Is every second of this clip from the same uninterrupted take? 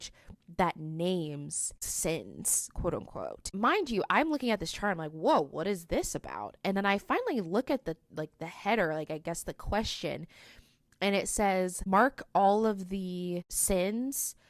no; 3 cuts; at 1.9 s, 3.5 s, 13.5 s

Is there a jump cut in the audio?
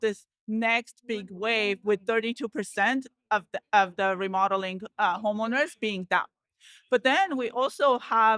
no; 0 cuts

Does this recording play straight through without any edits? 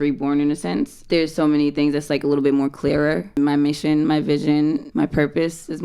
no; 3 cuts; at 1.0 s, 3.4 s, 4.9 s

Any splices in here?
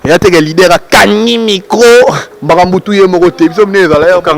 yes; 1 cut; at 2.3 s

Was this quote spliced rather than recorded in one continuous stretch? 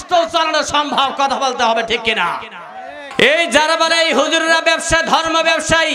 yes; 1 cut; at 3.0 s

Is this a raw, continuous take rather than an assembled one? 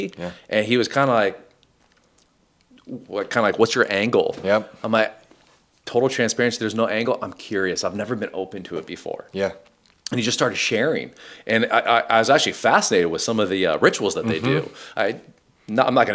yes; 0 cuts

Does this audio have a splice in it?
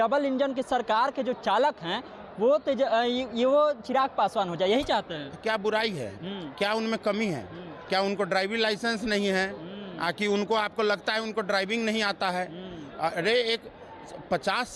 no; 0 cuts

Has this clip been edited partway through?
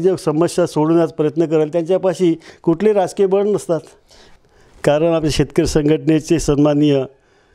yes; 1 cut; at 4.2 s

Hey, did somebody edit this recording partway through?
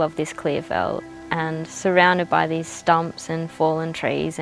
no; 0 cuts

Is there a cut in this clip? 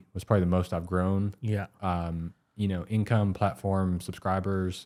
no; 0 cuts

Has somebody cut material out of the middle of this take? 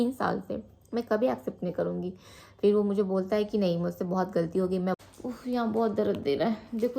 yes; 1 cut; at 5.0 s

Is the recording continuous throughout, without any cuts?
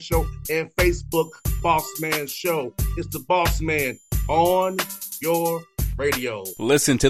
yes; 0 cuts

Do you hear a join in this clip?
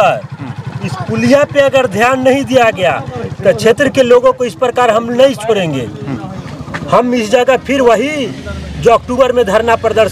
no; 0 cuts

